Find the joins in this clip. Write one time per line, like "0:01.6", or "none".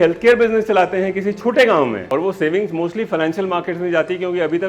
0:02.0